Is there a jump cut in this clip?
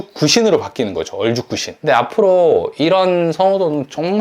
yes; 1 cut; at 1.7 s

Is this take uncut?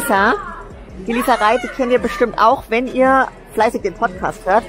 yes; 0 cuts

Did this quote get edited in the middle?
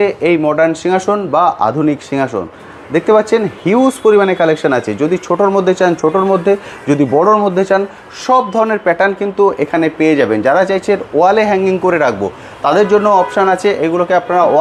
no; 0 cuts

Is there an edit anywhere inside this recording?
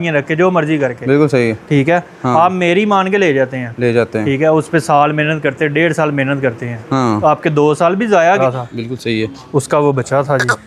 yes; 1 cut; at 8.4 s

